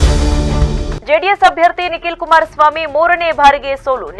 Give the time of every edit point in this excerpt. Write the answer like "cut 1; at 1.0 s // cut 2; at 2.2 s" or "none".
none